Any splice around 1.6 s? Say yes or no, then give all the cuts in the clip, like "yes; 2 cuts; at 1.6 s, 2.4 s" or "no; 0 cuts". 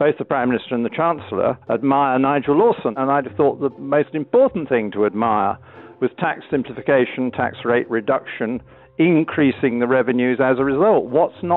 yes; 2 cuts; at 1.6 s, 2.9 s